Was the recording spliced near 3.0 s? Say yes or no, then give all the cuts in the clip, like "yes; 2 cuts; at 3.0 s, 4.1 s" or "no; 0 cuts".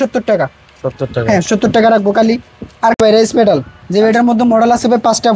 yes; 1 cut; at 3.0 s